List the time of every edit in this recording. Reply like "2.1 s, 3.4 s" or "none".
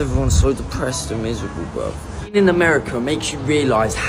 2.4 s